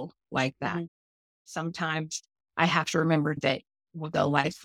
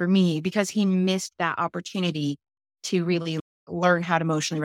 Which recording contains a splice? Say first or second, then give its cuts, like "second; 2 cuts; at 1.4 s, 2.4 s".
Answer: first; 2 cuts; at 1.6 s, 3.4 s